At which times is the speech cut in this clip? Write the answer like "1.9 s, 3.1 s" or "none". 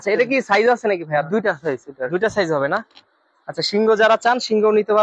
none